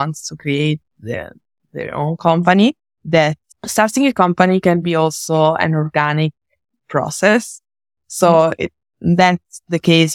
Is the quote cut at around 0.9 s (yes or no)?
no